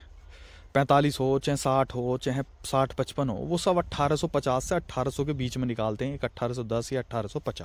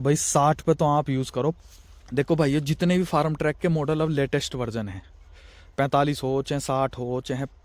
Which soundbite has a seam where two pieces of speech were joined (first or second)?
second